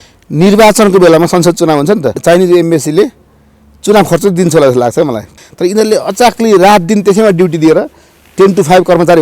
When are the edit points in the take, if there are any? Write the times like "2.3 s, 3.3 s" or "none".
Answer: 2.2 s, 5.3 s